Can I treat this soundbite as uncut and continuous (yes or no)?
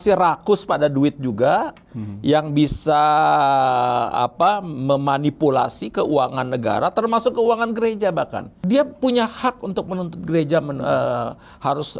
no